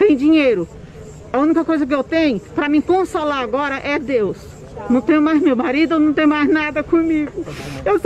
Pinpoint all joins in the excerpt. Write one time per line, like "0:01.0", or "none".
none